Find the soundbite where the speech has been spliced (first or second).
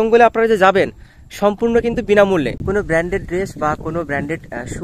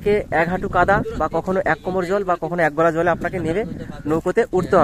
first